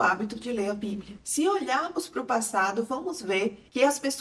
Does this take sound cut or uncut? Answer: uncut